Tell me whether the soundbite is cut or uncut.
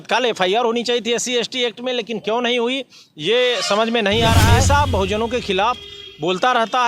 cut